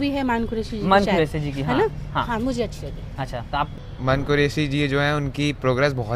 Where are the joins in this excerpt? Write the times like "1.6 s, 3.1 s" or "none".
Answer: 3.8 s